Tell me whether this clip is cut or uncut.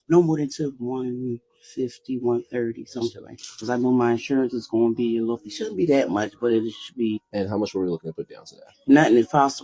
uncut